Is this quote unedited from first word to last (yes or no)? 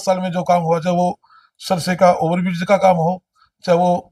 yes